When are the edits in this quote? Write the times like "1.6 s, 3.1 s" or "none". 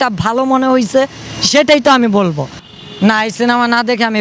2.7 s